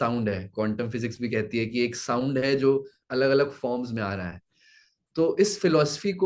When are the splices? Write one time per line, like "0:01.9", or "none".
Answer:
none

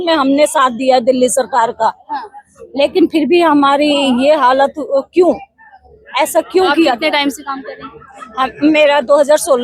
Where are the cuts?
none

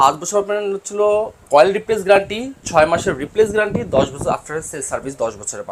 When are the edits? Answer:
0:01.4

